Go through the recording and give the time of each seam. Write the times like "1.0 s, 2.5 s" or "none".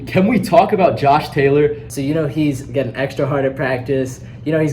1.9 s